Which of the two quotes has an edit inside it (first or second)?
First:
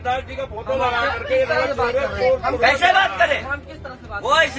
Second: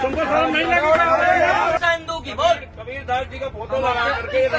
second